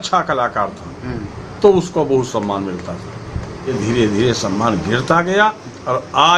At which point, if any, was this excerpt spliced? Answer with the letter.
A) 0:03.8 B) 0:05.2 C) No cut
A